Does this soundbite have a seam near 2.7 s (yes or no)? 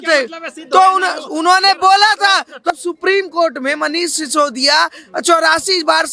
yes